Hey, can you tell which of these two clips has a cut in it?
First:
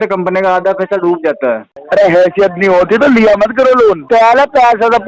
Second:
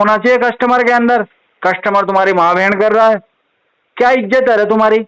first; 2 cuts; at 1.7 s, 4.0 s

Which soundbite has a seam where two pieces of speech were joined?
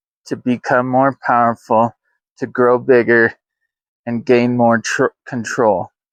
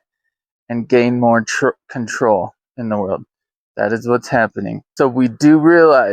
second; 1 cut; at 4.8 s

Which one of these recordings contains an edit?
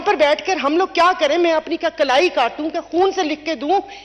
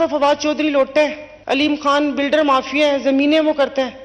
second; 1 cut; at 1.3 s

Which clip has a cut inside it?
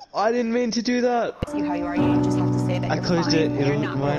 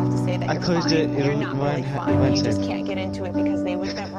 first; 1 cut; at 1.4 s

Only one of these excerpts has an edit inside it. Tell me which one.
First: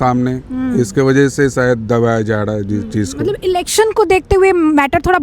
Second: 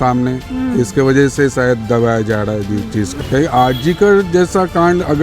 second; 1 cut; at 3.1 s

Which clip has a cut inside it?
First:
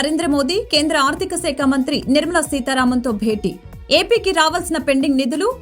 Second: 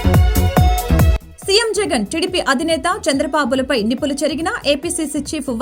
second; 1 cut; at 1.2 s

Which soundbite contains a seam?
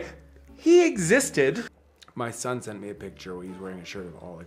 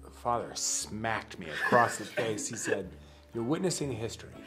first; 1 cut; at 1.7 s

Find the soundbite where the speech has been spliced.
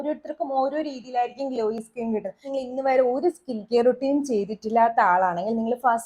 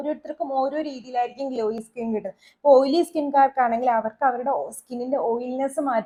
first; 1 cut; at 2.5 s

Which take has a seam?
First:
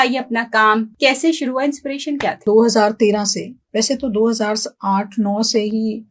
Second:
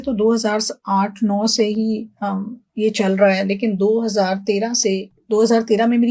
first; 2 cuts; at 0.9 s, 2.4 s

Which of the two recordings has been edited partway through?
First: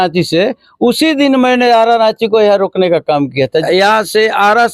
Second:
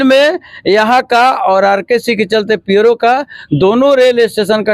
first; 1 cut; at 3.7 s

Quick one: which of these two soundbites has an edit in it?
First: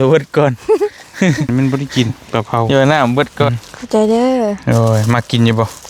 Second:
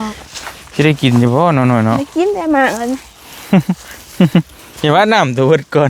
first; 3 cuts; at 1.5 s, 2.7 s, 3.5 s

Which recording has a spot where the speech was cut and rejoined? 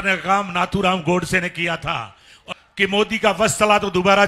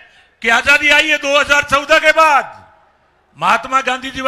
first; 1 cut; at 2.5 s

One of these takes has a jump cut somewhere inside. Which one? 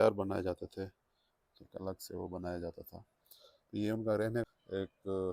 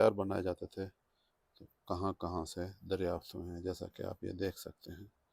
first; 2 cuts; at 1.7 s, 4.4 s

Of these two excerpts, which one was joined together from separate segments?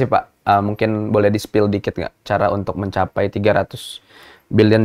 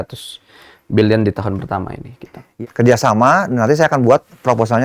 second; 1 cut; at 2.5 s

